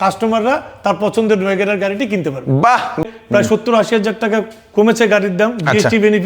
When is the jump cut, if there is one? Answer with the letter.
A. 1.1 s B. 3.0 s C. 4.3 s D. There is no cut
B